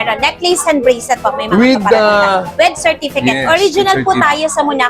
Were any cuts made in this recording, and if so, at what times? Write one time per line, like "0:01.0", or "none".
none